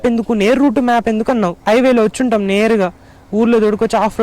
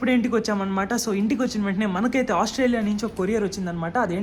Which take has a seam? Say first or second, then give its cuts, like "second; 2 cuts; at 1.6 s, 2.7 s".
first; 1 cut; at 1.6 s